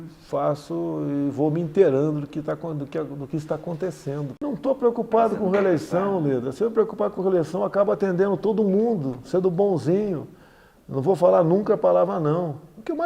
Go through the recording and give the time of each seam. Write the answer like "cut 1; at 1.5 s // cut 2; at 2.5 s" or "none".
cut 1; at 4.3 s